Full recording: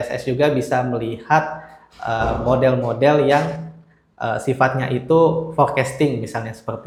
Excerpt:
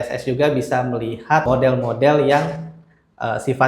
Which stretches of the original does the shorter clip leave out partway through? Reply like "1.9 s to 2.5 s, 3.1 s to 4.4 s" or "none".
1.4 s to 2.4 s